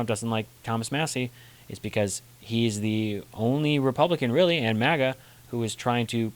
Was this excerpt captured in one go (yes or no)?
yes